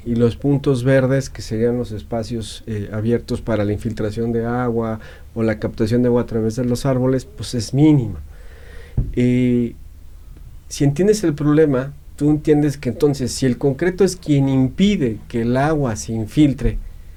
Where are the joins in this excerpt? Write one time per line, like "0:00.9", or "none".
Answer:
none